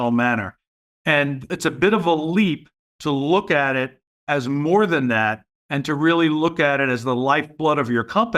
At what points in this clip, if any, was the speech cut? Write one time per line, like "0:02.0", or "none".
0:01.5